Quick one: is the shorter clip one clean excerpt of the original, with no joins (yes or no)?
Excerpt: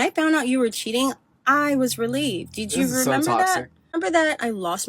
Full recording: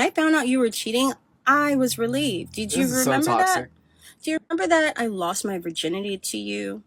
no